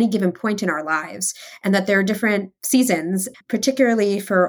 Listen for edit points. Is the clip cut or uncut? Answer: cut